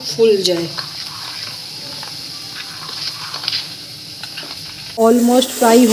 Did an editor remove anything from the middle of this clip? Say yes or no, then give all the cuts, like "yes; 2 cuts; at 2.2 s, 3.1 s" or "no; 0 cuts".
yes; 1 cut; at 4.9 s